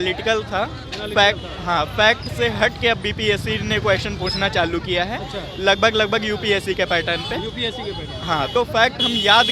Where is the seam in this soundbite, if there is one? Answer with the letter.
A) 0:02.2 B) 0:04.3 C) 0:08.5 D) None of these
C